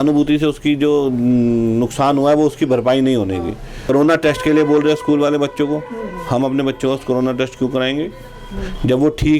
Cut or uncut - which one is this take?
cut